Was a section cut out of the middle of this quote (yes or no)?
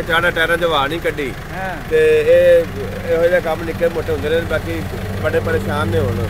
no